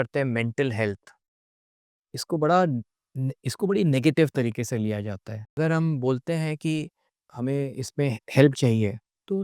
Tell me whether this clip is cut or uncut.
cut